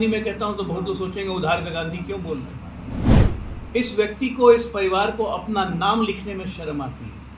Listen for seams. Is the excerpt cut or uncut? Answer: uncut